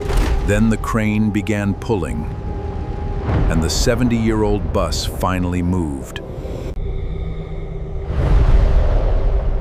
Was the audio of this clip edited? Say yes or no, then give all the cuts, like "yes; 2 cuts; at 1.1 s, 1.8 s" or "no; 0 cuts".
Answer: no; 0 cuts